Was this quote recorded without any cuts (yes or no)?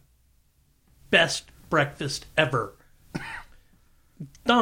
yes